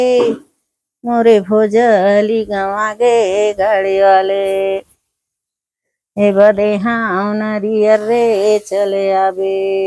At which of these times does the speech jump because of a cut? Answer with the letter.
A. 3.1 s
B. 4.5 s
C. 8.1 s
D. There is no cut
D